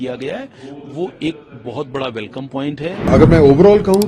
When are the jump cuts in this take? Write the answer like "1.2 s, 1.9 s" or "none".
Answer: 3.0 s